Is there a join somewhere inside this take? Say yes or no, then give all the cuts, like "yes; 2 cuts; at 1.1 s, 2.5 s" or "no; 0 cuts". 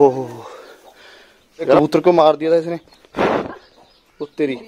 yes; 1 cut; at 1.8 s